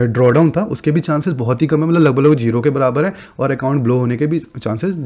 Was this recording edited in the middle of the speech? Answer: no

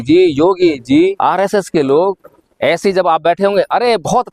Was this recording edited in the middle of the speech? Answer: yes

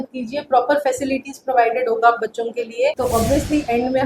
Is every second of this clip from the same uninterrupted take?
no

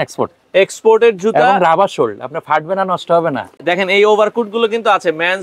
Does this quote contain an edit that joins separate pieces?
yes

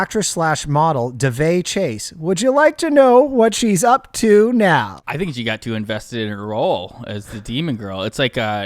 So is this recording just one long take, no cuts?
no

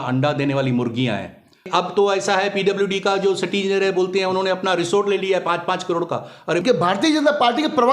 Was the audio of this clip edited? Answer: yes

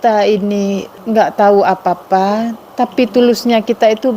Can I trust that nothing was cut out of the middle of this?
no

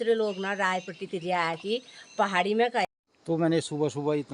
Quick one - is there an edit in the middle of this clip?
yes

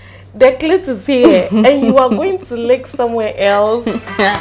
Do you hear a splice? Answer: no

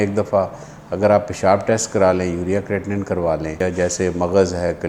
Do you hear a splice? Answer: yes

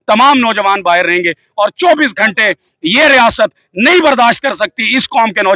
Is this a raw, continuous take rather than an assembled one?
yes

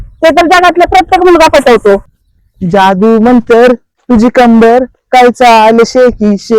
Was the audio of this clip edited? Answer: yes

